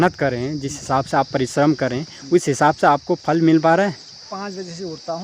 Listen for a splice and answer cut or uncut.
cut